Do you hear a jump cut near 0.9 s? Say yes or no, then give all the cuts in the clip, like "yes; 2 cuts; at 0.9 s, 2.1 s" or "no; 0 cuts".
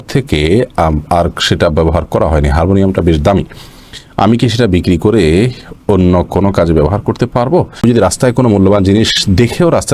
no; 1 cut; at 7.8 s